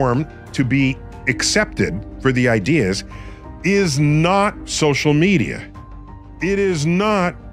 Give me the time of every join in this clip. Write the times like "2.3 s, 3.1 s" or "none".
none